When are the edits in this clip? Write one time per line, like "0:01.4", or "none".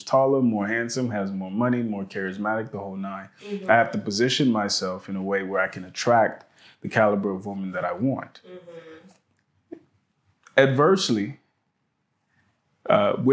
none

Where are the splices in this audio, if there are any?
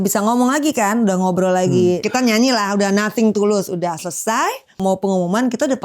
0:02.0
0:04.8

